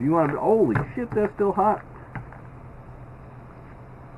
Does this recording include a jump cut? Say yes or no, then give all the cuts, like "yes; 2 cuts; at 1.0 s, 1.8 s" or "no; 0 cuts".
no; 0 cuts